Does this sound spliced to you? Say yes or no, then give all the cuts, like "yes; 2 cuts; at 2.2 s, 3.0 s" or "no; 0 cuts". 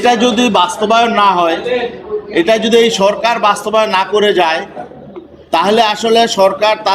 no; 0 cuts